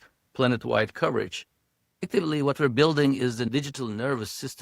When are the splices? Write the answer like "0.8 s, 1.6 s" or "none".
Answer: 2.0 s